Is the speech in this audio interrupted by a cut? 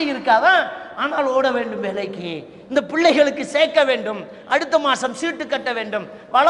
no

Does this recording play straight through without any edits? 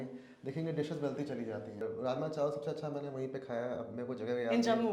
no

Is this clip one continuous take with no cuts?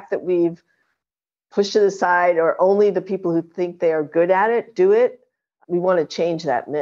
no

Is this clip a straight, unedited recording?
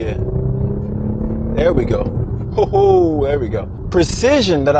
no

